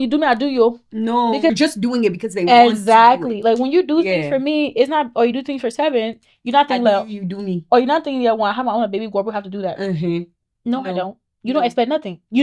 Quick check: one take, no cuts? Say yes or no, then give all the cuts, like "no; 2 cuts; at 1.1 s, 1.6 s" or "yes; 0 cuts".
no; 1 cut; at 1.5 s